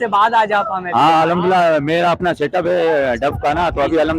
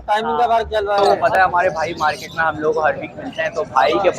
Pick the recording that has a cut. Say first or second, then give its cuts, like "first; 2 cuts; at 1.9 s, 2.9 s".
second; 1 cut; at 1.0 s